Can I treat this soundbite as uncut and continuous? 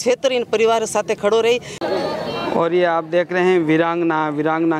no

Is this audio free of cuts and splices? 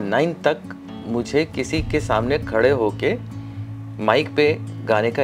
yes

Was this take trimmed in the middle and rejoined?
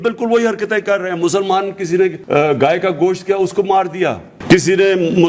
yes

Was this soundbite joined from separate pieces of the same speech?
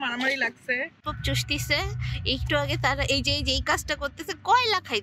yes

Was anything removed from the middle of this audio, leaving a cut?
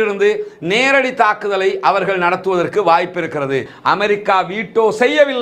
yes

